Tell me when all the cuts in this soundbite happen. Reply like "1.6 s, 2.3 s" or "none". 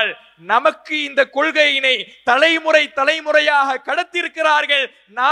none